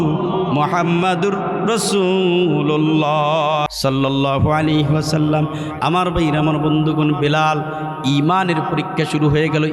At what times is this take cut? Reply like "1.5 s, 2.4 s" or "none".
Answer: 3.7 s